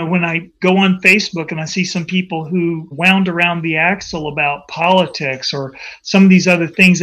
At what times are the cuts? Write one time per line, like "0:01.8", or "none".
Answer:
0:02.9